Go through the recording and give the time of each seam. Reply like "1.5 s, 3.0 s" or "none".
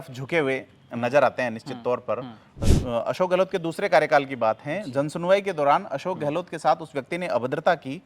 2.5 s